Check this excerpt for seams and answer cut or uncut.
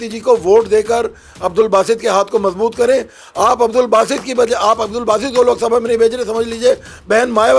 uncut